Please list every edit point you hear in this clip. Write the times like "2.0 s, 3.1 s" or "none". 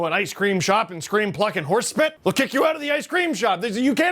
2.2 s